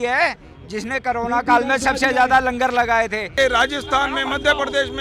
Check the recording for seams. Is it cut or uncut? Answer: cut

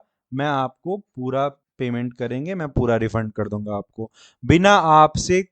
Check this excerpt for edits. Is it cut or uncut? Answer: cut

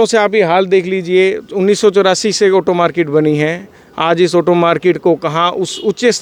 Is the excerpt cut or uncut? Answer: uncut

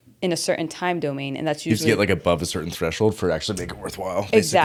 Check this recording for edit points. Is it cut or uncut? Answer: uncut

